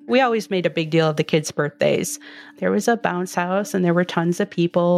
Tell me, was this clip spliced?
no; 0 cuts

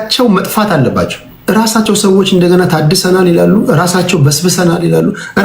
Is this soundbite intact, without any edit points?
no; 1 cut; at 1.3 s

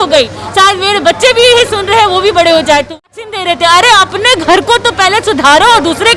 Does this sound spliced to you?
yes; 1 cut; at 3.0 s

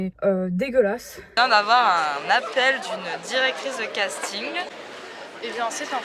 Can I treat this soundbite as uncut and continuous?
no; 2 cuts; at 1.3 s, 4.7 s

